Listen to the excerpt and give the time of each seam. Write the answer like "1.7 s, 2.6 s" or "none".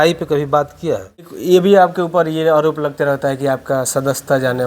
1.3 s